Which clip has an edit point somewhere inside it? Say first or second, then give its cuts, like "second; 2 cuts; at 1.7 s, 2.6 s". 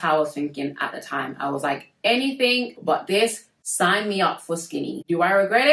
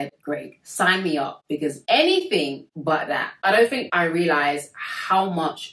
second; 3 cuts; at 1.8 s, 3.3 s, 3.9 s